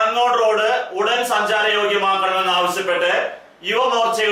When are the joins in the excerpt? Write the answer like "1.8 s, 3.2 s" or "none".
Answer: none